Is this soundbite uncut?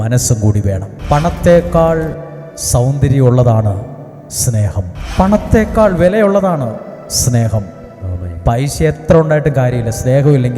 no; 2 cuts; at 0.9 s, 5.0 s

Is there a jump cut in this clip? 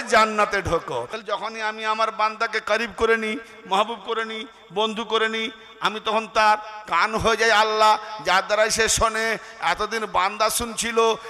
yes; 1 cut; at 1.1 s

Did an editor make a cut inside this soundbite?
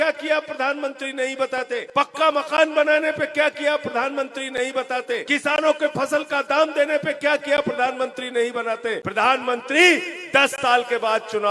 yes; 3 cuts; at 1.9 s, 5.2 s, 9.0 s

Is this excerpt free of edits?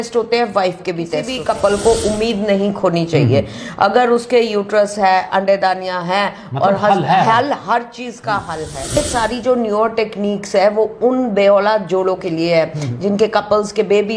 no; 2 cuts; at 1.3 s, 9.0 s

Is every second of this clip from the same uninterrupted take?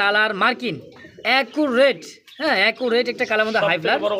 yes; 0 cuts

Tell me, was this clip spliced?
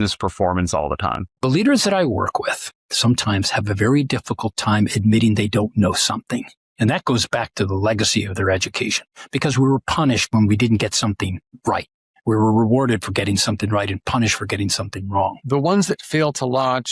yes; 2 cuts; at 1.3 s, 15.4 s

